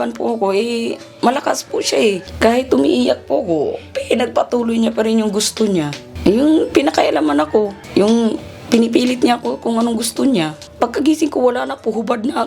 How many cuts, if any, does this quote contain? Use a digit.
4